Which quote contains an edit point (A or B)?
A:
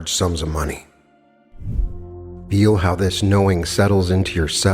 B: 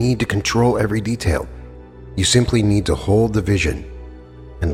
A